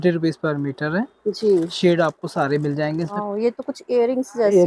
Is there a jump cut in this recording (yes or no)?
yes